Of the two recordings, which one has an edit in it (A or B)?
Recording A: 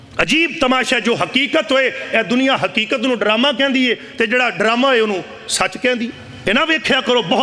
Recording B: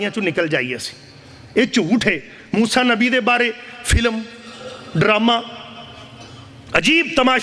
A